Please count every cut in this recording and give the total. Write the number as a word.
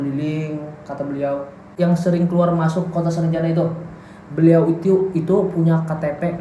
one